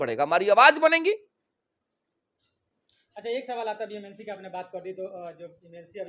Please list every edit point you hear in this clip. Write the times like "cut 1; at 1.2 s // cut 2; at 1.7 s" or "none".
none